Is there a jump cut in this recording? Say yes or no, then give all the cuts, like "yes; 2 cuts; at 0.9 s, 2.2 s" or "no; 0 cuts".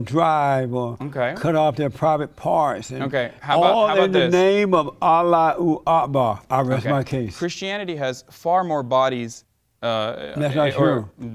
no; 0 cuts